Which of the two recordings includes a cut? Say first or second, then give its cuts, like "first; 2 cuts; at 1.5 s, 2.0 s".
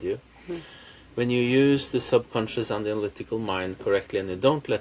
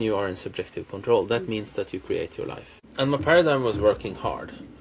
second; 1 cut; at 2.9 s